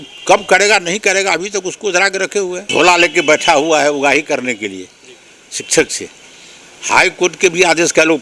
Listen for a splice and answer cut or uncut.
cut